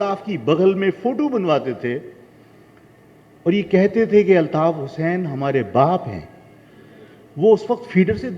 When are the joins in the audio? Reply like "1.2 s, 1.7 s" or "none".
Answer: none